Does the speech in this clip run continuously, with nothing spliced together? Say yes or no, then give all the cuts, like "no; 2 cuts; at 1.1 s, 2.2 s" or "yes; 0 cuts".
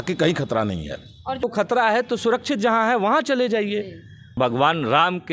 no; 2 cuts; at 1.4 s, 4.4 s